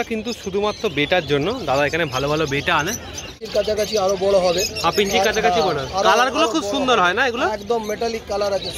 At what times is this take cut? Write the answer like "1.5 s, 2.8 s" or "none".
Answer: 3.4 s

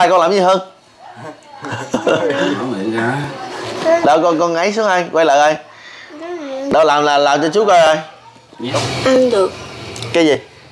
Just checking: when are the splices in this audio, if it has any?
8.6 s

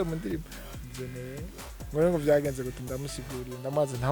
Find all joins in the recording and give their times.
none

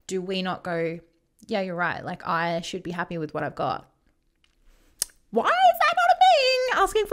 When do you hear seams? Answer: none

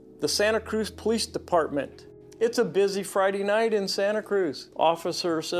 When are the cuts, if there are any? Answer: 4.6 s

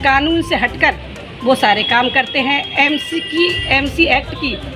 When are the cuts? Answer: none

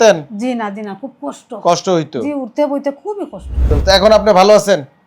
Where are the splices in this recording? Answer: 3.7 s

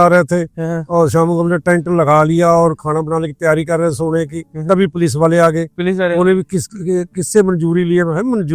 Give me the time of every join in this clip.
none

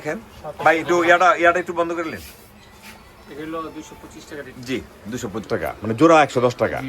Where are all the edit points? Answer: 5.5 s

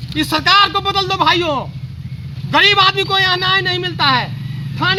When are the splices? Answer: none

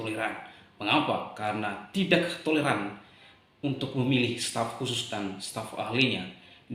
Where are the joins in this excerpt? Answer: none

